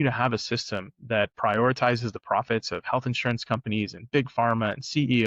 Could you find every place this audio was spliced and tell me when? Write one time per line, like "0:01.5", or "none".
none